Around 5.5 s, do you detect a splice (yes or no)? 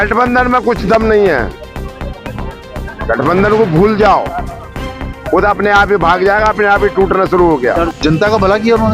no